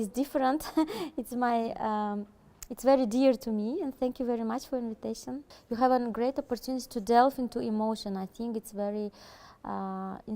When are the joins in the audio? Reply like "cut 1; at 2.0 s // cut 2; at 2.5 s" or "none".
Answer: cut 1; at 5.5 s